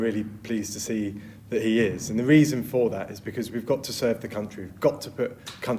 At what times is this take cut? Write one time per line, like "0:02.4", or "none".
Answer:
none